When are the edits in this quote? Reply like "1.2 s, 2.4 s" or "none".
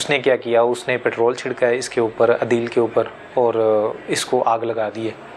none

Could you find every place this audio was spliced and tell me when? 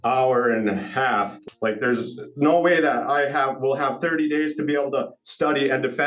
1.4 s

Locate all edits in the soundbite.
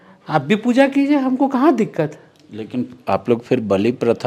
none

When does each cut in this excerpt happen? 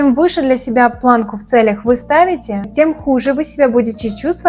2.6 s

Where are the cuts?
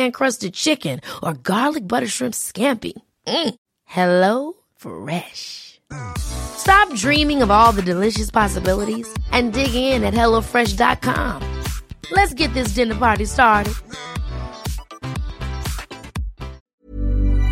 16.6 s

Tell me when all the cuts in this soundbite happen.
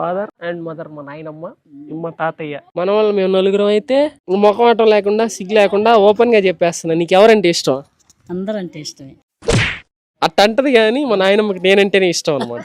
2.7 s

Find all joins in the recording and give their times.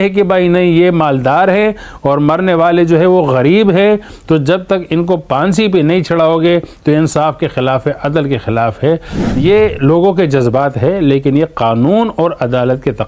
none

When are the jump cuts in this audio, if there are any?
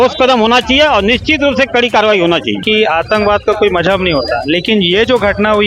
2.6 s

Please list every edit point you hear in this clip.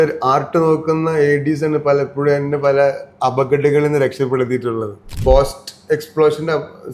5.2 s

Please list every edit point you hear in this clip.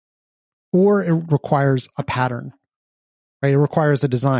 none

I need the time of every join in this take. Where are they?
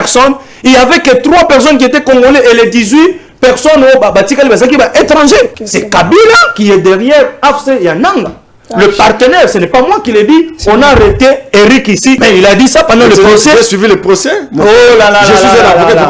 5.5 s, 12.2 s

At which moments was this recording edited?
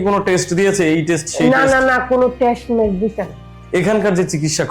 3.5 s

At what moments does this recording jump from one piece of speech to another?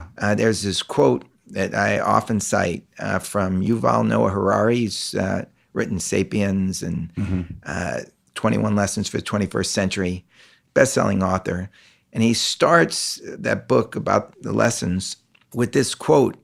none

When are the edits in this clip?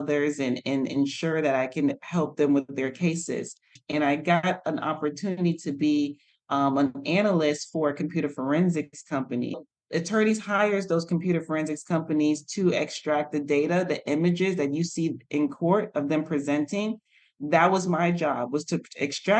3.8 s, 9.6 s

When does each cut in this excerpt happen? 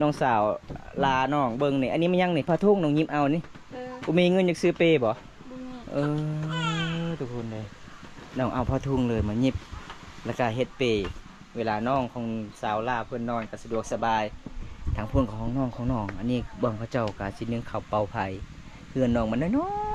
none

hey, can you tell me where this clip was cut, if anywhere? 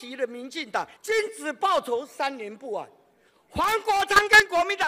0.9 s

